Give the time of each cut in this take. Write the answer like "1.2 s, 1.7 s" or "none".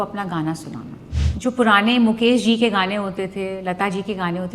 1.1 s